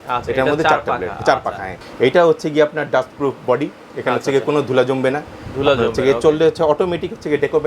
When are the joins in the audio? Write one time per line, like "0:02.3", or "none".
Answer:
0:01.8